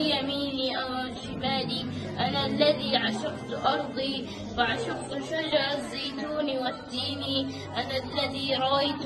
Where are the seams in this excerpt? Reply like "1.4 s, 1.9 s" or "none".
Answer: none